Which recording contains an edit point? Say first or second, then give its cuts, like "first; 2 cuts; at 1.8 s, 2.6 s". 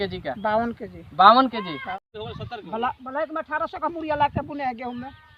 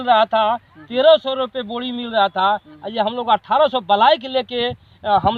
first; 1 cut; at 2.1 s